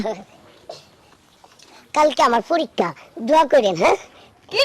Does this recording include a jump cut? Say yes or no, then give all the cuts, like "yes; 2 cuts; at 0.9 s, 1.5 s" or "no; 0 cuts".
no; 0 cuts